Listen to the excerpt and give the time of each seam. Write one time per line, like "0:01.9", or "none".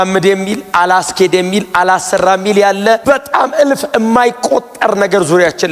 0:03.0

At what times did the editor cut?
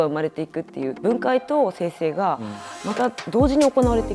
0:00.9

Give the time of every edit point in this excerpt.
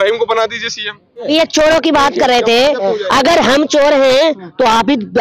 0:01.3

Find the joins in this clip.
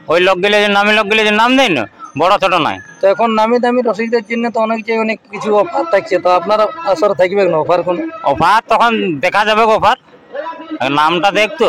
none

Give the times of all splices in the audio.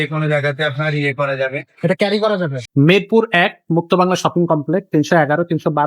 0:02.6

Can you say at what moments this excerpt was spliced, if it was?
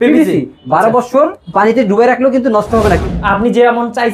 0:01.4
0:03.1

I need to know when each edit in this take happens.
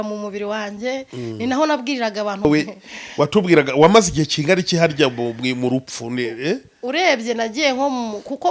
0:02.5

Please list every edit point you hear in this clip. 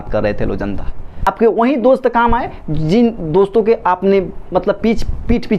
0:01.2

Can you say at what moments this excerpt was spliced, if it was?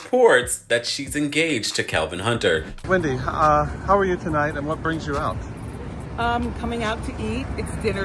0:02.7

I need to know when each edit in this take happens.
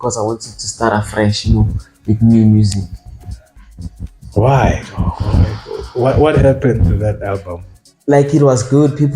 none

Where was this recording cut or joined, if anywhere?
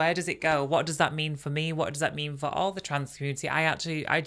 none

